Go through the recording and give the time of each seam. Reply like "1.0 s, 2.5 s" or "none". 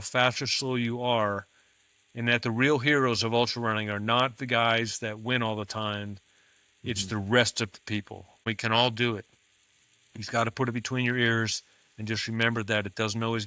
8.4 s